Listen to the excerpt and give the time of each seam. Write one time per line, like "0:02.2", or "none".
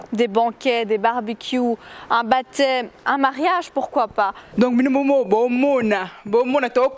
0:04.4